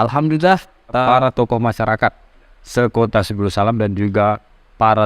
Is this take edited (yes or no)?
yes